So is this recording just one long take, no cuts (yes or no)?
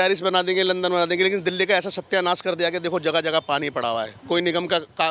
yes